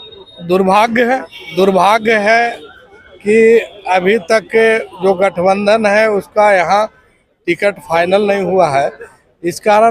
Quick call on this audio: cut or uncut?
uncut